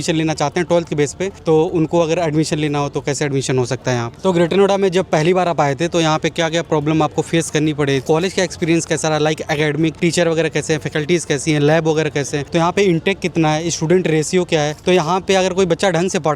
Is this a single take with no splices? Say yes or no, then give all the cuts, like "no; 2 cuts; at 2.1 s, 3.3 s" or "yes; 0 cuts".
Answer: no; 5 cuts; at 4.1 s, 8.0 s, 10.0 s, 12.4 s, 14.7 s